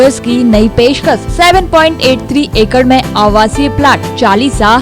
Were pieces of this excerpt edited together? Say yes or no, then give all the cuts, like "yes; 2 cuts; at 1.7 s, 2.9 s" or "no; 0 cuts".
no; 0 cuts